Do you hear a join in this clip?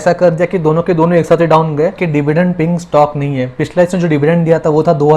yes; 1 cut; at 2.0 s

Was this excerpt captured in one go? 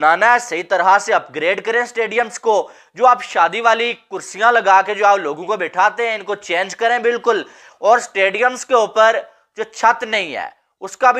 yes; 0 cuts

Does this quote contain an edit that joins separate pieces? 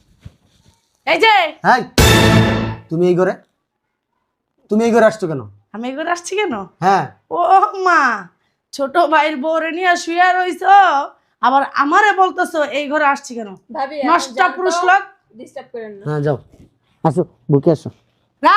yes; 2 cuts; at 1.6 s, 2.8 s

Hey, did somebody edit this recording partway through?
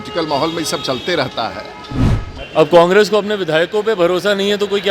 yes; 1 cut; at 2.3 s

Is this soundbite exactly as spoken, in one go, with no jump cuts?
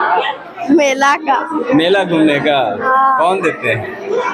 yes; 0 cuts

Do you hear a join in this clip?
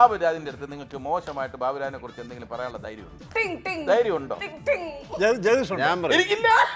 no; 0 cuts

